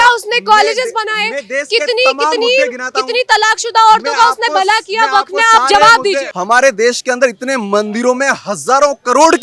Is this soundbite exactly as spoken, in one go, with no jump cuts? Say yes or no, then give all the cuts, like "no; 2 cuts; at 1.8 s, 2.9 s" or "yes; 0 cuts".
no; 1 cut; at 6.3 s